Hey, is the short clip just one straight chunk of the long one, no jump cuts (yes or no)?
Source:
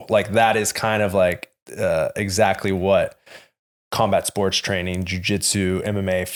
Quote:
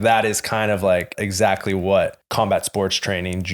no